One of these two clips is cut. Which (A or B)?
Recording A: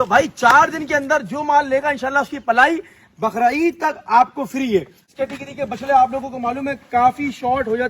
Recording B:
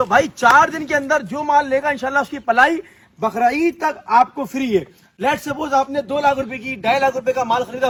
A